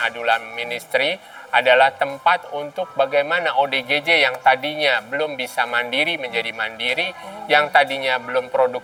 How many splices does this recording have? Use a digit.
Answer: 0